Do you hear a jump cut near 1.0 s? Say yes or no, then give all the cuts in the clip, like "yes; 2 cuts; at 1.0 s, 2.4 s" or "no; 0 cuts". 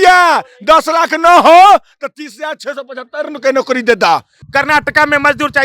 no; 1 cut; at 4.4 s